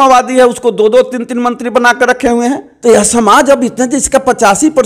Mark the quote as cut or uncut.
cut